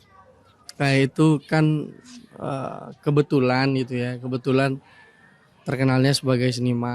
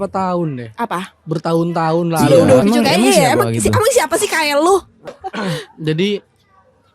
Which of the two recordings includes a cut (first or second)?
second